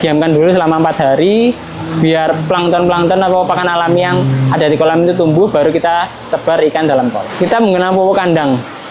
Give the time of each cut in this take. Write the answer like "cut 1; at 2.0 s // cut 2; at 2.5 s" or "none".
none